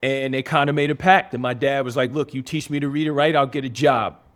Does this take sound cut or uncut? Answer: uncut